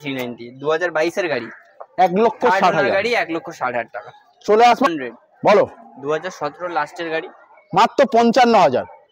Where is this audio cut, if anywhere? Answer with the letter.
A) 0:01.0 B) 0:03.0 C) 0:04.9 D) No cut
C